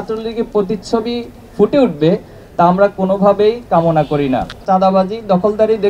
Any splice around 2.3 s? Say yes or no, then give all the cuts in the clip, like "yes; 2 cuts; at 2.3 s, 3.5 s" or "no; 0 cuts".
no; 1 cut; at 4.5 s